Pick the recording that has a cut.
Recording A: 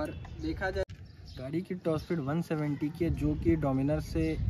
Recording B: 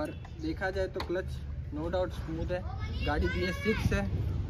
A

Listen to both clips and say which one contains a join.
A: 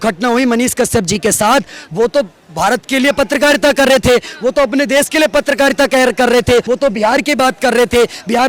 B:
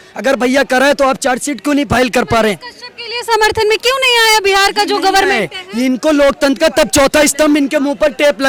A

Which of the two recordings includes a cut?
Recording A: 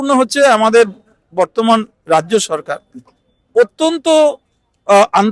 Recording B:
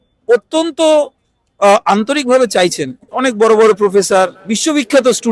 B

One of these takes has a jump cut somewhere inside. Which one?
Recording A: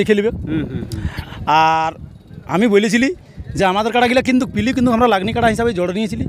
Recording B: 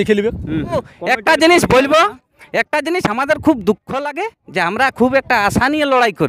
B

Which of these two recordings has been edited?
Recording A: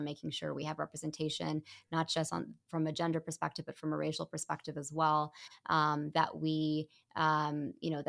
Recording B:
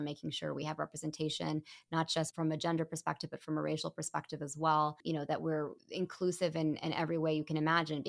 B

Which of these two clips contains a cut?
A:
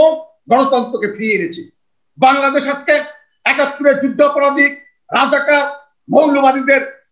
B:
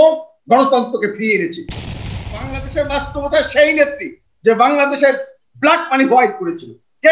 B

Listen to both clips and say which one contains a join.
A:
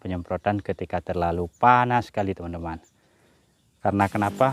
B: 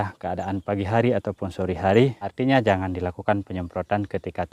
B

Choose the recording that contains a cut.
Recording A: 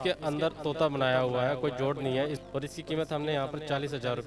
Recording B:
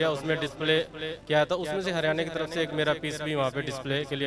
A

